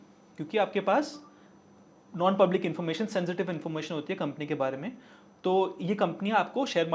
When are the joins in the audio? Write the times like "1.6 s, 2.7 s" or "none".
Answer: none